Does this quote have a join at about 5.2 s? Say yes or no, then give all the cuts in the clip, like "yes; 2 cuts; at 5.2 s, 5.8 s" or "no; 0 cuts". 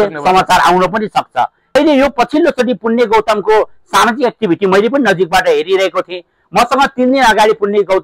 no; 1 cut; at 1.7 s